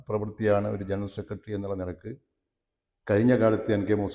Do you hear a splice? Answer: no; 0 cuts

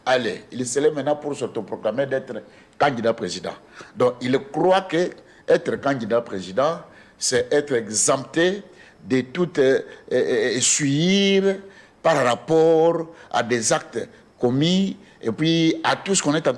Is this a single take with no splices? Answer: yes; 0 cuts

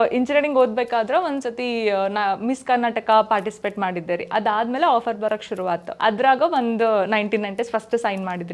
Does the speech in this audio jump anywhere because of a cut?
yes; 1 cut; at 5.9 s

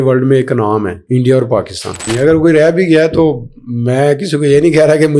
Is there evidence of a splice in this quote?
yes; 2 cuts; at 1.0 s, 2.1 s

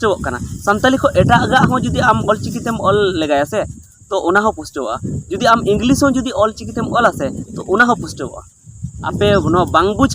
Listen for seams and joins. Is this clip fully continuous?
no; 1 cut; at 9.1 s

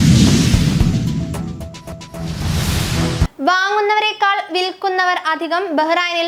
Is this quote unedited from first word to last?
no; 1 cut; at 2.1 s

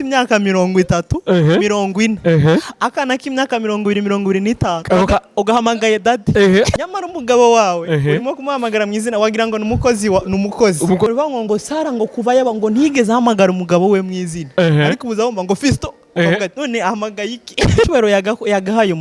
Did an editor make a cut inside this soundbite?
yes; 3 cuts; at 6.8 s, 11.1 s, 17.9 s

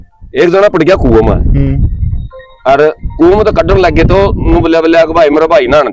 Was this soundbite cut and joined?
no; 0 cuts

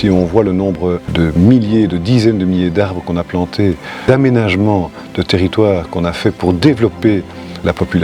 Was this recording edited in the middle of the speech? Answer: yes; 2 cuts; at 1.0 s, 4.0 s

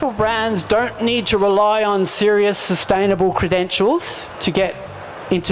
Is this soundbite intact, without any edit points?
yes; 0 cuts

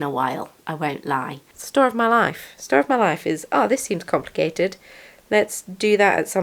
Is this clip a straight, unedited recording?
no; 1 cut; at 1.5 s

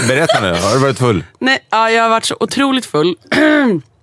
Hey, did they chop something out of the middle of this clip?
no; 0 cuts

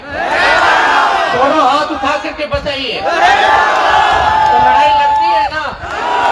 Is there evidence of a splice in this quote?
no; 0 cuts

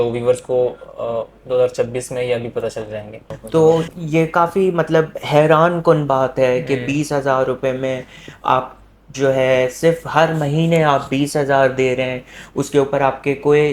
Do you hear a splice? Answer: yes; 1 cut; at 3.3 s

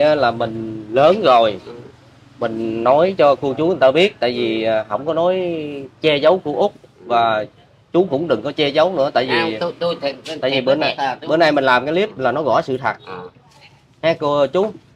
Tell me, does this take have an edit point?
no; 0 cuts

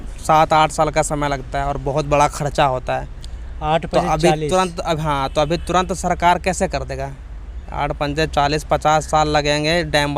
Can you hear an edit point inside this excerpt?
no; 0 cuts

